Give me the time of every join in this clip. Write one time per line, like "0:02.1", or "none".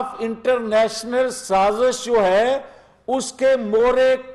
none